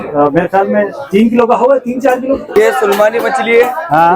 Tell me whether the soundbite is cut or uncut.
cut